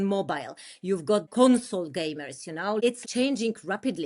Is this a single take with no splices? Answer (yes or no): no